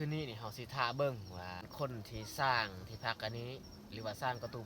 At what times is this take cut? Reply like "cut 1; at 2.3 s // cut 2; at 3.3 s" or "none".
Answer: cut 1; at 1.6 s